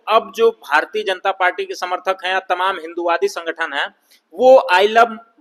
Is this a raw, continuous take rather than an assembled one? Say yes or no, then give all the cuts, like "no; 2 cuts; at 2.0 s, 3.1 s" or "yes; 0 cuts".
yes; 0 cuts